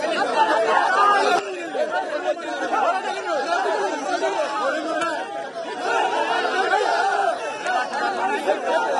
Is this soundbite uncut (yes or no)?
no